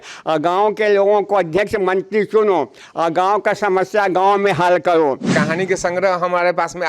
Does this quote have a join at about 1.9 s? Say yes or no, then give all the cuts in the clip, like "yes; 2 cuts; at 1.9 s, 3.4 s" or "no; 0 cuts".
no; 1 cut; at 5.2 s